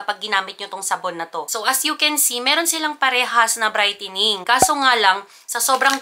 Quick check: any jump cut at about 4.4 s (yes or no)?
yes